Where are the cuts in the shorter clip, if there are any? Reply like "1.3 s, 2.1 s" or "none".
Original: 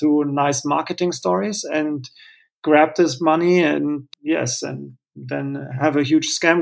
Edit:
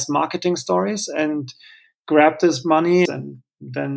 3.1 s